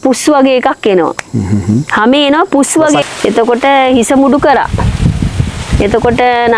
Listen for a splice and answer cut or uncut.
cut